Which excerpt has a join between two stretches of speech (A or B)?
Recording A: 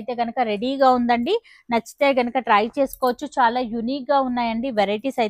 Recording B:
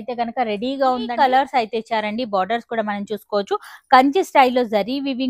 B